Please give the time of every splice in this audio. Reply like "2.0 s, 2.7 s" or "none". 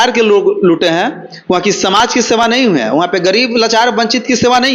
none